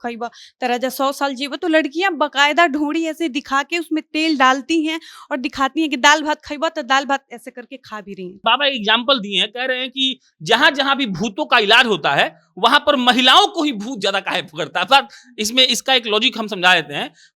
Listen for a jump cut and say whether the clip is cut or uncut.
cut